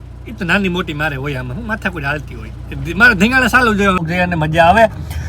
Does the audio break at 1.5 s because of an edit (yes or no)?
no